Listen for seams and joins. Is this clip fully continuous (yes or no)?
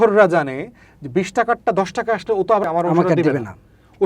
no